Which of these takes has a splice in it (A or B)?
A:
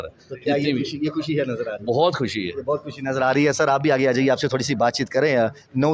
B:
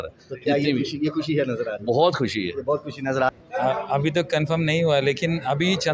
B